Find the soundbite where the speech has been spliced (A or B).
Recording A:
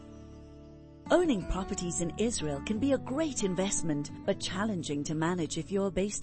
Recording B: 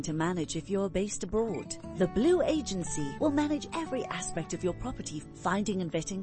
A